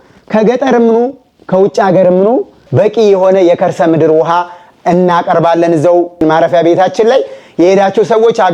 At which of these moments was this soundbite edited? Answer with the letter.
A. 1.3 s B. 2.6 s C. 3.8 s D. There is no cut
B